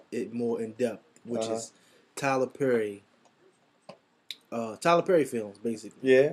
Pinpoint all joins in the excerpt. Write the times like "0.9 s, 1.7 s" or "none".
2.2 s